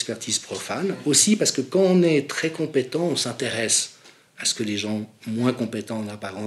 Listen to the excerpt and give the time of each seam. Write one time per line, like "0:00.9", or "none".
none